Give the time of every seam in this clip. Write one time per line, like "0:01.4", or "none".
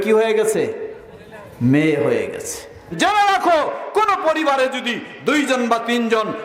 0:02.8